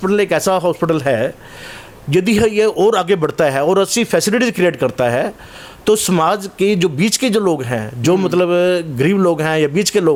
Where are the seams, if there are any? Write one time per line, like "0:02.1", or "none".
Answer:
none